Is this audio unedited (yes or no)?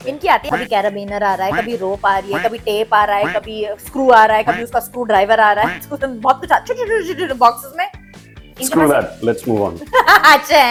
yes